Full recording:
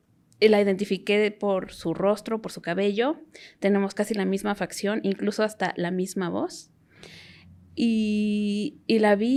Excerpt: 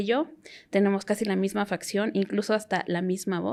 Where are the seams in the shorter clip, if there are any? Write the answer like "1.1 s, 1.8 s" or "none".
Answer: none